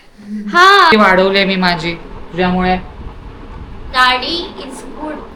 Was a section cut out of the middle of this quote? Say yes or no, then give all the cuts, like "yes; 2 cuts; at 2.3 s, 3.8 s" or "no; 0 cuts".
yes; 1 cut; at 0.9 s